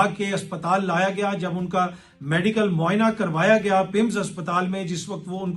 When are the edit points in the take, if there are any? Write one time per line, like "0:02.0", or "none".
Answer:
none